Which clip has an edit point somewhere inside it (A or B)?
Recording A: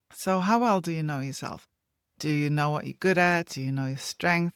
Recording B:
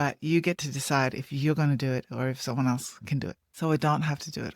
B